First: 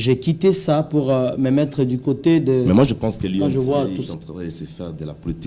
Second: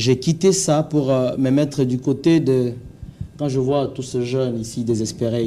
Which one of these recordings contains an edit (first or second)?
first